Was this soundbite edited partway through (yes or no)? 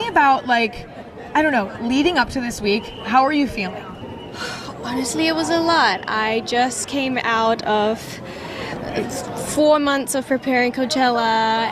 no